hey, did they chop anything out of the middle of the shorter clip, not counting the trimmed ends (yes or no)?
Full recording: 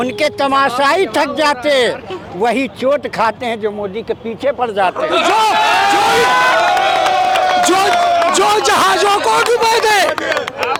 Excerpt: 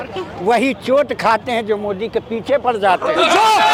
no